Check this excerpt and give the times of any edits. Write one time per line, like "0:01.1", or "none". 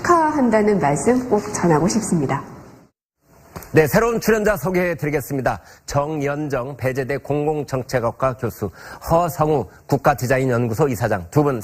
0:10.2